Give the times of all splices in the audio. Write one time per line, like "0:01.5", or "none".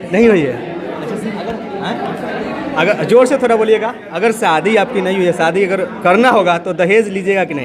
none